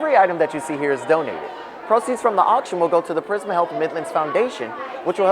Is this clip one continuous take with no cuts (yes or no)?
yes